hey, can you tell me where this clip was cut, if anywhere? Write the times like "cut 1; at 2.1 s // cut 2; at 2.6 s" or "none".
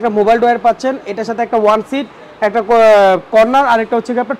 none